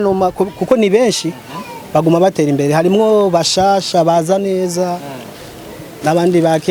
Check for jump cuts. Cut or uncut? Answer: uncut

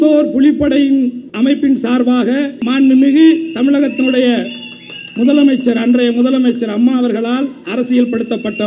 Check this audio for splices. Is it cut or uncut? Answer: cut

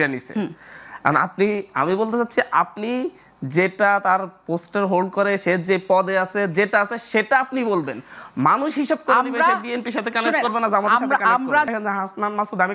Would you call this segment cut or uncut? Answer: cut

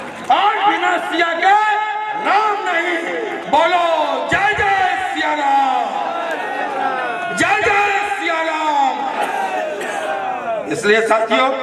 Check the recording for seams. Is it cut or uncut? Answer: uncut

